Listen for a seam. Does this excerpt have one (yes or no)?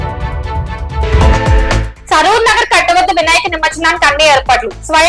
yes